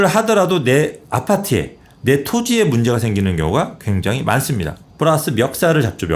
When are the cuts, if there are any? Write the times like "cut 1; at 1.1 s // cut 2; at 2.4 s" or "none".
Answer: cut 1; at 4.7 s